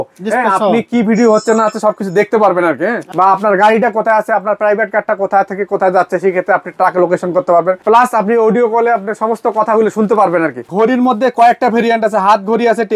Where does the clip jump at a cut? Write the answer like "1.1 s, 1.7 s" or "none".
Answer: 3.1 s, 10.7 s